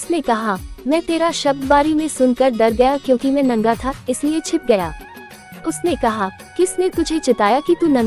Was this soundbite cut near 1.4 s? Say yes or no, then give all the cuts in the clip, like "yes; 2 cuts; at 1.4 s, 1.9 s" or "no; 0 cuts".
no; 0 cuts